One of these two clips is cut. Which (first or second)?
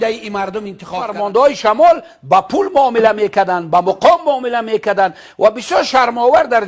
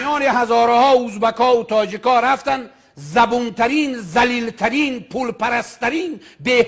first